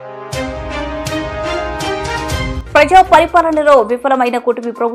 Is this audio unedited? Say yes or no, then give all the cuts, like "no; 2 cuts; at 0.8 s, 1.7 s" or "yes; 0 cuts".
no; 1 cut; at 2.5 s